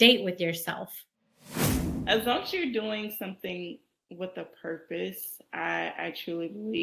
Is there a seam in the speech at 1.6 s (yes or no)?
yes